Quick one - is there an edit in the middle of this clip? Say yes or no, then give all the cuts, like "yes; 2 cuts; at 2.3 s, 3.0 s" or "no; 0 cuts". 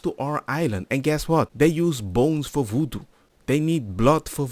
yes; 1 cut; at 1.5 s